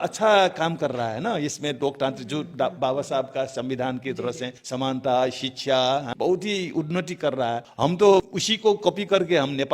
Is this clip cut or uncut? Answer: cut